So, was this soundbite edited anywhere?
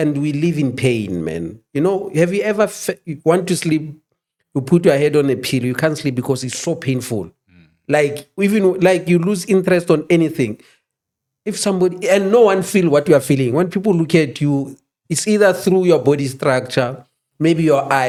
no; 0 cuts

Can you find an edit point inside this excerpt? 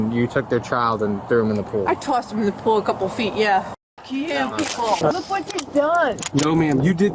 yes; 2 cuts; at 3.8 s, 5.1 s

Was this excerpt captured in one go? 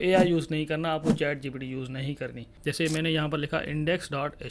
no; 1 cut; at 2.5 s

